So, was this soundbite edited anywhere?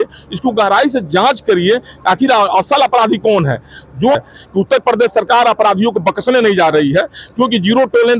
yes; 1 cut; at 4.2 s

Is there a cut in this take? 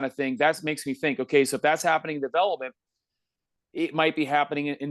no; 0 cuts

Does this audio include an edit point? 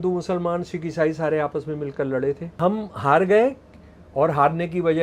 yes; 1 cut; at 2.5 s

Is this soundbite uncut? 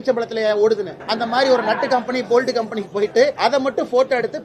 no; 2 cuts; at 1.0 s, 3.3 s

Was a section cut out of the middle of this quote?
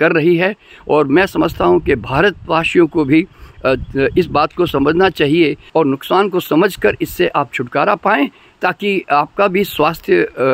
yes; 1 cut; at 5.6 s

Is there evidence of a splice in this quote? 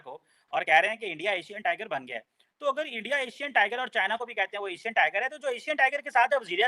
no; 0 cuts

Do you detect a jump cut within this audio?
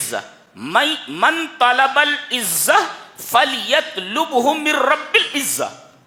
no; 0 cuts

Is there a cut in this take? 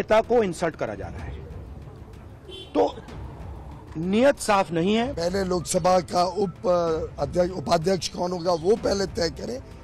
yes; 1 cut; at 5.1 s

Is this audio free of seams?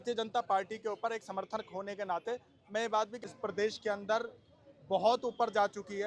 no; 1 cut; at 3.2 s

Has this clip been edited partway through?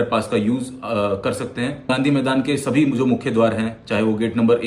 yes; 1 cut; at 1.9 s

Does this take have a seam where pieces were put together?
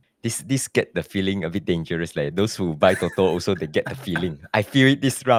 no; 0 cuts

